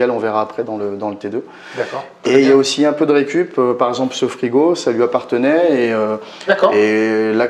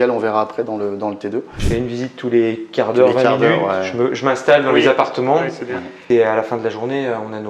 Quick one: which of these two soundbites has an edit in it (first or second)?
second